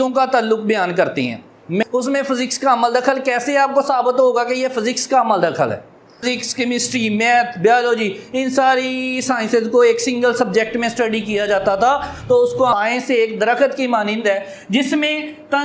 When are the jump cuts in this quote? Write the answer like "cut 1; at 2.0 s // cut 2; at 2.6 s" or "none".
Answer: cut 1; at 1.8 s // cut 2; at 6.2 s // cut 3; at 12.7 s